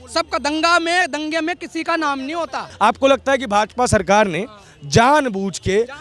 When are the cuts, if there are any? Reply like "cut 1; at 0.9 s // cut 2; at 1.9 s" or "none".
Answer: cut 1; at 2.7 s